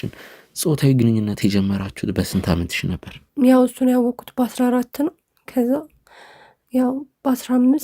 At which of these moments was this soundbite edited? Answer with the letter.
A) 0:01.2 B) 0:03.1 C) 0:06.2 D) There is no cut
B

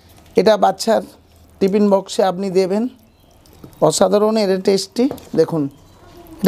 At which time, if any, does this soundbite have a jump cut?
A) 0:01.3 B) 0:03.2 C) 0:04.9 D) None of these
D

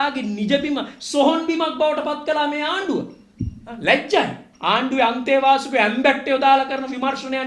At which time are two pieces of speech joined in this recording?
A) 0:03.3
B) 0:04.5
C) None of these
B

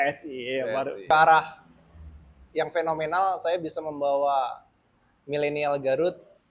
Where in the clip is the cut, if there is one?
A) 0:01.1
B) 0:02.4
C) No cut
A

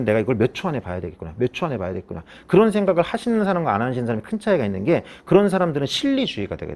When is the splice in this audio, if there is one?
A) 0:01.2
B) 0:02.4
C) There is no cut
C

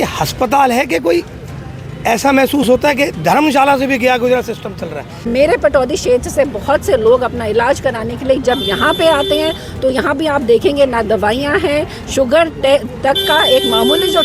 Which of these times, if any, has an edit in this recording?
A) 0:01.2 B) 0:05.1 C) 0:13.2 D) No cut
B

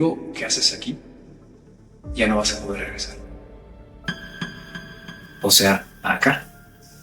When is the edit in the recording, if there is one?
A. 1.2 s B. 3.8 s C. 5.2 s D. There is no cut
D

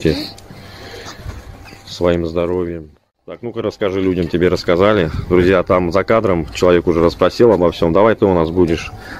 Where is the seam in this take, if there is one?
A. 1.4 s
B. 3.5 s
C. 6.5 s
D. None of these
B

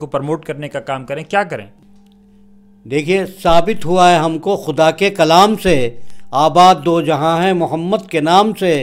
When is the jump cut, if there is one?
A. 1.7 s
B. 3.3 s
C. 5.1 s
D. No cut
A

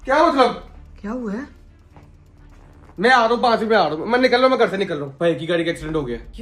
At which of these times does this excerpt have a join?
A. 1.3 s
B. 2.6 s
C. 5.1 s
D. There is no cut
C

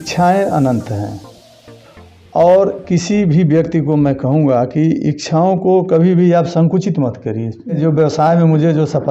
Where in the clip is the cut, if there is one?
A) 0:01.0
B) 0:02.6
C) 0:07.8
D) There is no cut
C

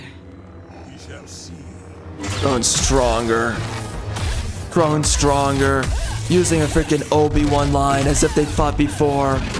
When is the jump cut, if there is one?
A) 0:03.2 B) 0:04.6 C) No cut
C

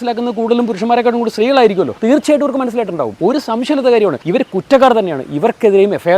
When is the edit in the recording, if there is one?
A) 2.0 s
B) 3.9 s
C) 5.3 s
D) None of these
A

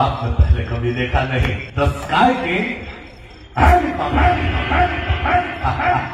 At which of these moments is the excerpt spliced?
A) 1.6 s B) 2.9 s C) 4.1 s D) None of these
A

